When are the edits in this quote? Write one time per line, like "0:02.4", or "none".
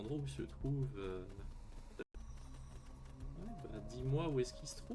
0:02.1